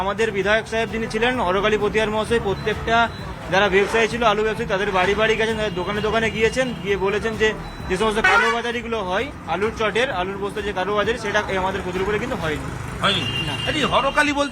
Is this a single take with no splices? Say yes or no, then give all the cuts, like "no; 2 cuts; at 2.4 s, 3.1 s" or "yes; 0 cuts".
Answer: yes; 0 cuts